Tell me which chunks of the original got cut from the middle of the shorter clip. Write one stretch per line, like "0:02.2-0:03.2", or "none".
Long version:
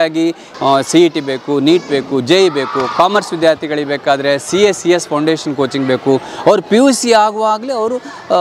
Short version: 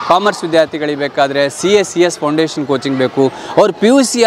none